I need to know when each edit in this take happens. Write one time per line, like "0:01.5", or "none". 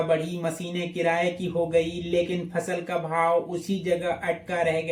none